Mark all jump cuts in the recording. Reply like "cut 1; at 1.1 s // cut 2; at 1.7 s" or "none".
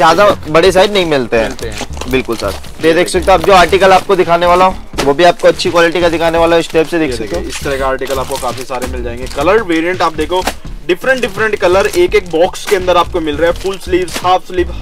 none

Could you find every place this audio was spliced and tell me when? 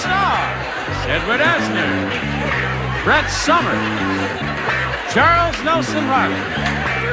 none

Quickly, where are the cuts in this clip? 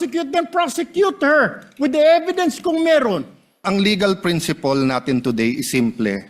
cut 1; at 3.6 s

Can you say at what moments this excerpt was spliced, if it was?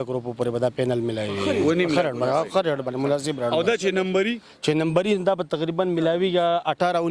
none

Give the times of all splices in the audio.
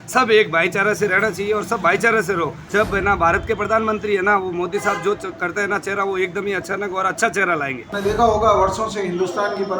cut 1; at 2.6 s // cut 2; at 7.9 s

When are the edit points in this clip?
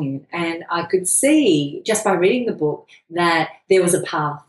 cut 1; at 1.8 s

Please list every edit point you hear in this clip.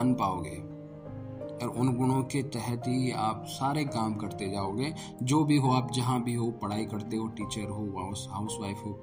none

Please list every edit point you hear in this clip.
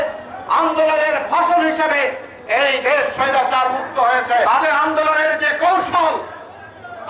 cut 1; at 4.4 s

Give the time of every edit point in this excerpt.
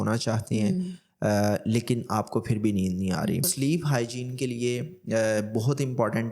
cut 1; at 3.5 s

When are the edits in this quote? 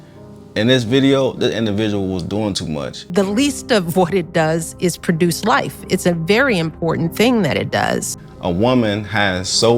cut 1; at 3.1 s // cut 2; at 8.1 s

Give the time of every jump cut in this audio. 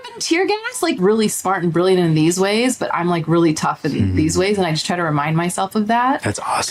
cut 1; at 0.9 s

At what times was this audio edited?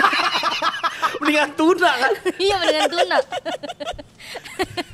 none

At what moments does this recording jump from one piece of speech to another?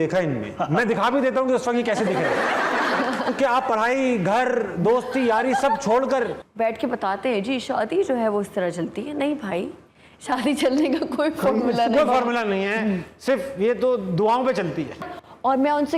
cut 1; at 6.4 s // cut 2; at 15.0 s

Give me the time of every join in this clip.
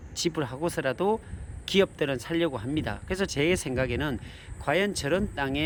none

